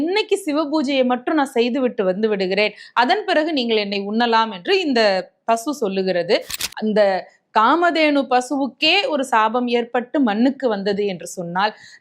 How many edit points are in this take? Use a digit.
1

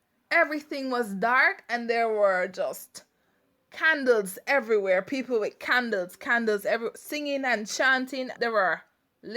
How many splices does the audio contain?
1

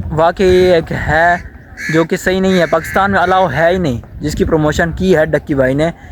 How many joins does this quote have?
0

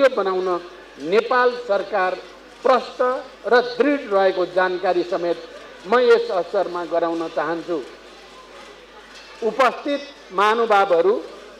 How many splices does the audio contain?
0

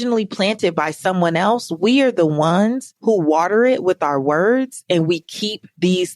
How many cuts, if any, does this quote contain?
1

